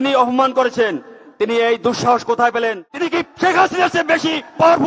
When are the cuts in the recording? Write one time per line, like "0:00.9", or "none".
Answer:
0:02.9